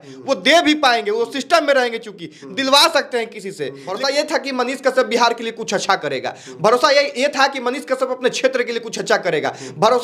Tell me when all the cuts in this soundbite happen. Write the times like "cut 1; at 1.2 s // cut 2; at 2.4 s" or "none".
cut 1; at 3.8 s